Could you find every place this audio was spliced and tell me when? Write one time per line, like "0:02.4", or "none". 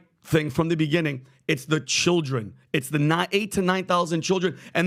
none